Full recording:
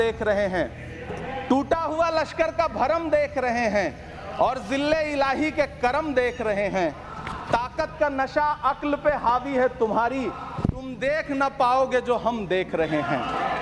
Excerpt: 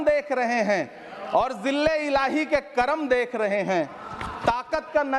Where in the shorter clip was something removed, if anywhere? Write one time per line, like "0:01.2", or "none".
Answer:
none